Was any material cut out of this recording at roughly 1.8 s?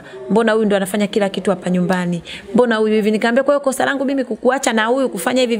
no; 0 cuts

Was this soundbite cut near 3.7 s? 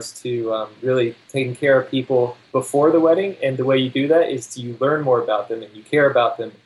no; 2 cuts; at 1.2 s, 2.4 s

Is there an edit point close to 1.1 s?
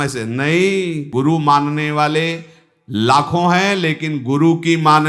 yes; 1 cut; at 1.1 s

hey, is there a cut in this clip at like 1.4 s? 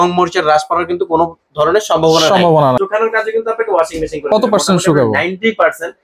no; 1 cut; at 2.8 s

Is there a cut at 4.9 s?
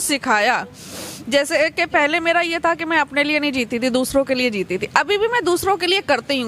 no; 0 cuts

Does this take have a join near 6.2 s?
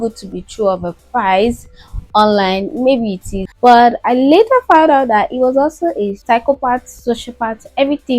yes; 2 cuts; at 3.4 s, 6.2 s

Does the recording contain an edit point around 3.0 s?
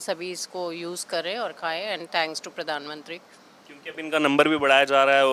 no; 0 cuts

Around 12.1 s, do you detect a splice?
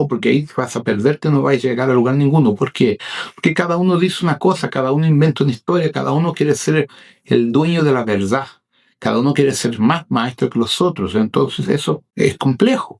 yes; 1 cut; at 12.1 s

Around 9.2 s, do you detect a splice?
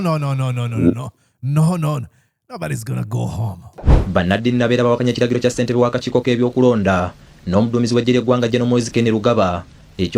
no; 1 cut; at 3.9 s

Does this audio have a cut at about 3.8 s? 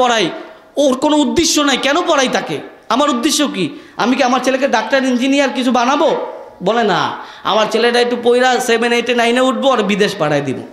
no; 0 cuts

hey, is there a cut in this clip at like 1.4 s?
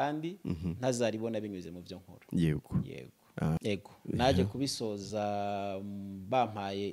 no; 1 cut; at 3.6 s

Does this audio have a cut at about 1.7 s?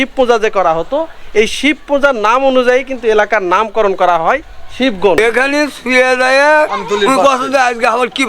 no; 1 cut; at 5.2 s

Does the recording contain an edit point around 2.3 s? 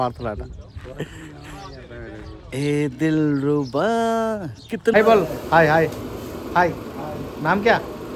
no; 1 cut; at 4.9 s

